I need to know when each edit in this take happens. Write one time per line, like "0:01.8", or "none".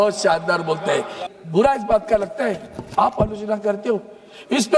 0:01.2

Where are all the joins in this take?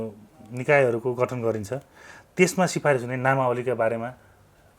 none

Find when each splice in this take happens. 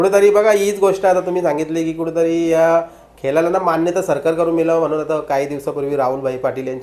none

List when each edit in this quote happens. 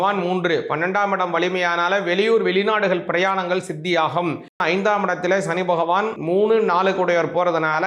0:04.6
0:06.1

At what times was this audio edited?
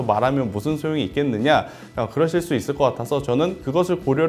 none

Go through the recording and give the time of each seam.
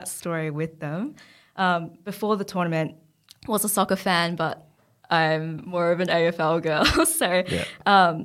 none

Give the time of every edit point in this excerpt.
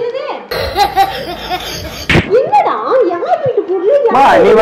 0:02.1

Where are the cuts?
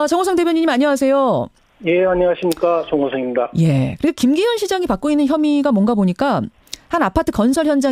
0:05.2

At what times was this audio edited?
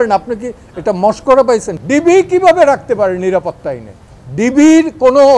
0:01.7

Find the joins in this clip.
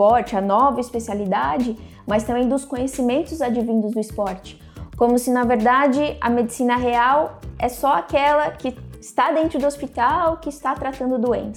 none

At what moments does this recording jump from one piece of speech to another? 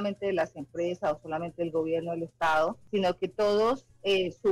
0:02.8

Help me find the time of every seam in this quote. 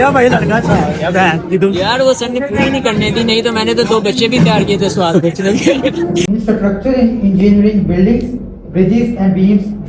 0:06.2

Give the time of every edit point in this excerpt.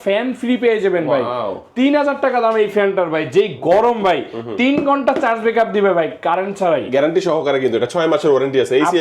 none

